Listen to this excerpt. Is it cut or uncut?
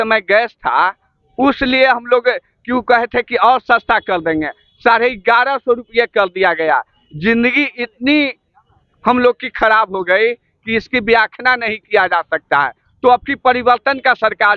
uncut